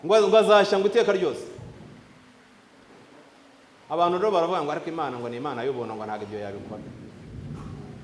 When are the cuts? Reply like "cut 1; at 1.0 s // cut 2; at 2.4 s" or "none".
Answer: none